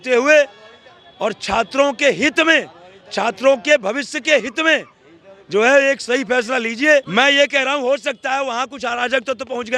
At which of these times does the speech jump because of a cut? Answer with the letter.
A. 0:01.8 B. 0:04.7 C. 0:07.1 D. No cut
C